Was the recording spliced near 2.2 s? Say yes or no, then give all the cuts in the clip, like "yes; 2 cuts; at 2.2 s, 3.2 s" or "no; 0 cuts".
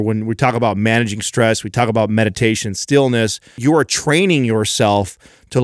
no; 1 cut; at 3.6 s